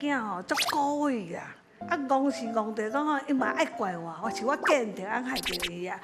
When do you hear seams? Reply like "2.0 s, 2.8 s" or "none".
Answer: none